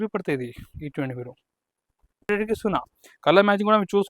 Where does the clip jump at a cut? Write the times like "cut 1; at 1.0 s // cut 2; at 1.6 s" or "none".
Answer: cut 1; at 2.3 s

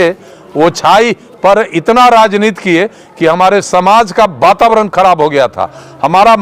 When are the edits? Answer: none

